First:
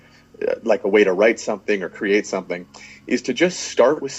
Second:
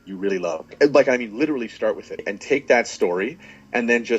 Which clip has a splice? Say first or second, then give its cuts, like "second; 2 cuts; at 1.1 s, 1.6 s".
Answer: second; 2 cuts; at 0.7 s, 2.2 s